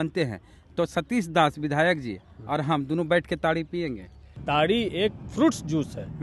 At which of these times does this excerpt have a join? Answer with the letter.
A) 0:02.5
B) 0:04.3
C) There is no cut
B